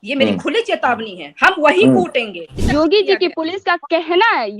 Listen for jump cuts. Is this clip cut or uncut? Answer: cut